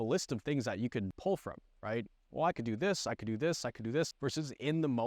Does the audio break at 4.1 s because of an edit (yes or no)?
yes